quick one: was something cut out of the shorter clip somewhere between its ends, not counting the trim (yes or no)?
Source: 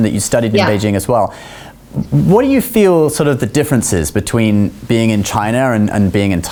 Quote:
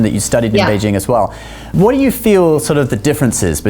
yes